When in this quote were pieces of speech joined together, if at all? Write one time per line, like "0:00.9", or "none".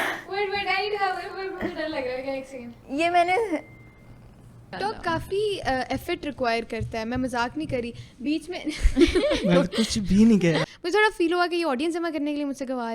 0:04.7
0:10.7

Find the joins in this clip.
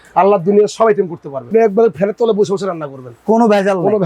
0:01.5

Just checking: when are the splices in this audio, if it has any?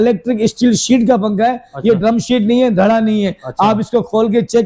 none

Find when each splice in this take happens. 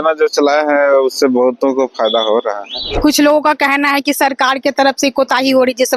0:03.0

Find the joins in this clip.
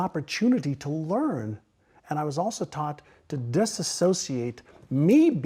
none

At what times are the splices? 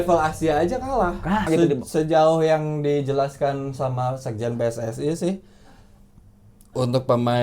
0:01.5

